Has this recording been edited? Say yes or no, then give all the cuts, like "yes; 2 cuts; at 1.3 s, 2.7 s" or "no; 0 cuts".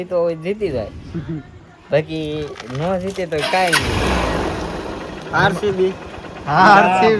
no; 0 cuts